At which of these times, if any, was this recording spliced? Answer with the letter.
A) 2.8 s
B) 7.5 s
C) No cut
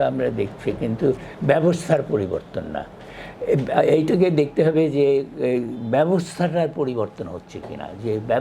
C